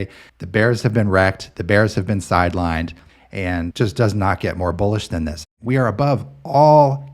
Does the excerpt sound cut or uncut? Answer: cut